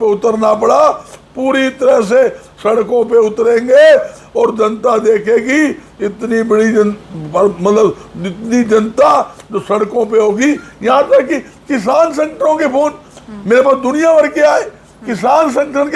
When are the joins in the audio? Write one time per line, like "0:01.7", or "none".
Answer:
none